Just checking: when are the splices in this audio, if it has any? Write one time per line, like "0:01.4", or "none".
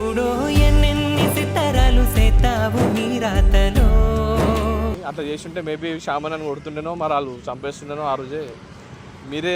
0:05.0